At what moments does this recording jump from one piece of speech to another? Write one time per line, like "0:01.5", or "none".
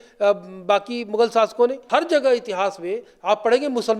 0:01.8